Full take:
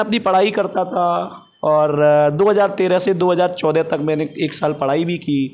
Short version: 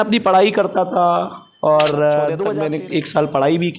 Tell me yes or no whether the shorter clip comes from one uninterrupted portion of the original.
no